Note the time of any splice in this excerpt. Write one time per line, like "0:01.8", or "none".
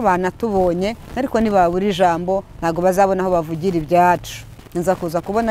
0:04.6